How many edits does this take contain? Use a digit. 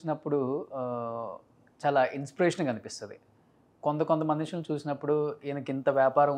0